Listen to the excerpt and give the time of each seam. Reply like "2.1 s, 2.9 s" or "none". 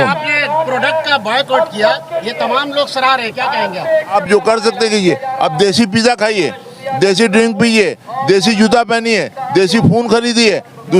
4.1 s